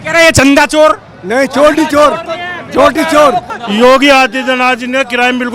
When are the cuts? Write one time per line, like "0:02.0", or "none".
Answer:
0:03.5